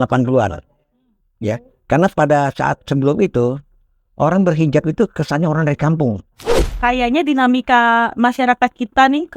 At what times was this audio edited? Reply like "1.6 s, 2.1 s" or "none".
6.8 s